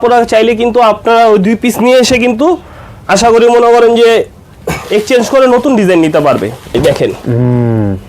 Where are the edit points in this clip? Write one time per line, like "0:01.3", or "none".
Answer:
0:06.7